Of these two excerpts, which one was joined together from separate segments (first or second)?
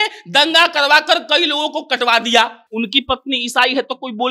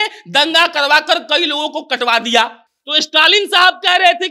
first